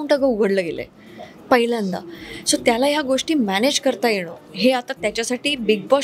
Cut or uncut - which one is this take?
uncut